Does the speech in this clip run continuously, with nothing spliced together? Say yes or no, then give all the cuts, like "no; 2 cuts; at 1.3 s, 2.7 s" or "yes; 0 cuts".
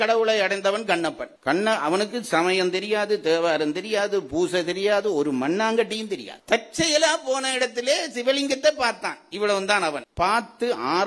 yes; 0 cuts